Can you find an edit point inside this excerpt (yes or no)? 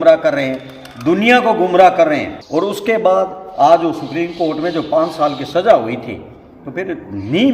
yes